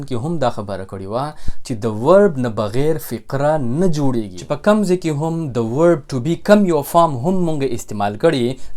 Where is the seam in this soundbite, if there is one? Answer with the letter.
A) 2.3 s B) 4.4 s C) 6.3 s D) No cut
B